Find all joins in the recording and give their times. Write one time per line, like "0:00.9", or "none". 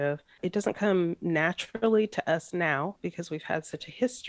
none